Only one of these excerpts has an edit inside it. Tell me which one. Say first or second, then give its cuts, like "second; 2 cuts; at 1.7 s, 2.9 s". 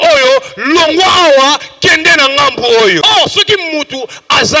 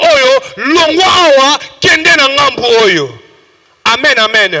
first; 1 cut; at 3.0 s